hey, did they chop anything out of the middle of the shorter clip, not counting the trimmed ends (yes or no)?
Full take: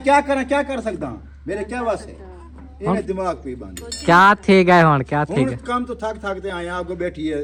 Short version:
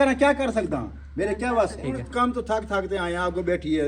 yes